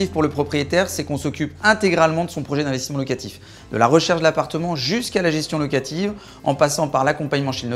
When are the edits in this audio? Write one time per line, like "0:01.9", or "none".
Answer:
none